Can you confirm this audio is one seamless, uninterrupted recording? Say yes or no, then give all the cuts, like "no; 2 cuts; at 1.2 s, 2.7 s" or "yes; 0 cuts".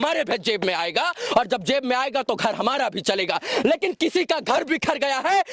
yes; 0 cuts